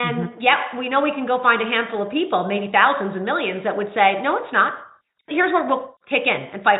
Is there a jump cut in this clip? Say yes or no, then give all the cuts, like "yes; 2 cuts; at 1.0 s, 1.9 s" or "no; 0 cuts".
yes; 1 cut; at 5.3 s